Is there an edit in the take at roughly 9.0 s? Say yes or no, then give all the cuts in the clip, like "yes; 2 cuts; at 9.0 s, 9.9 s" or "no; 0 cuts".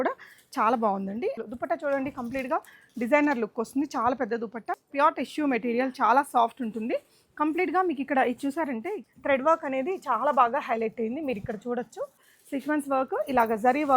yes; 4 cuts; at 1.4 s, 4.7 s, 9.0 s, 12.3 s